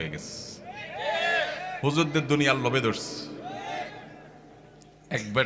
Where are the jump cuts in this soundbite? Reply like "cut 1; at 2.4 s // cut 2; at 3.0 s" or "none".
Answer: none